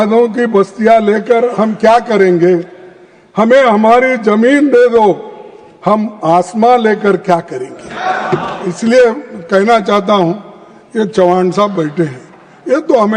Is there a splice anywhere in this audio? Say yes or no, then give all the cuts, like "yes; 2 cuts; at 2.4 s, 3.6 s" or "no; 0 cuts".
yes; 1 cut; at 8.6 s